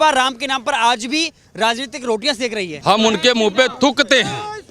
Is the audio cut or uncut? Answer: cut